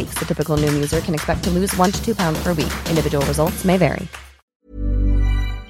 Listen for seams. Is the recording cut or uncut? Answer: cut